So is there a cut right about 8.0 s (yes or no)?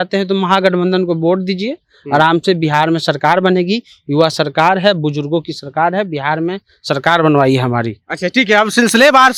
no